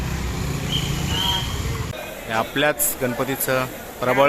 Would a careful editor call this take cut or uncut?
cut